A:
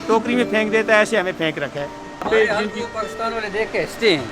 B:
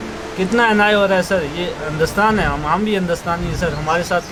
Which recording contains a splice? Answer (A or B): A